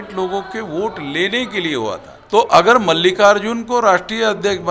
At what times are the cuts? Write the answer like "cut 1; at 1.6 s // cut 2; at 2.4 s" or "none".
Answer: cut 1; at 2.1 s